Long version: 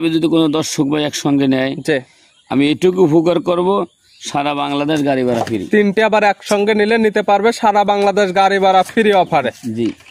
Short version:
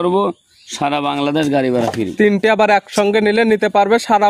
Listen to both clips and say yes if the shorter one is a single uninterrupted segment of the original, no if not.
yes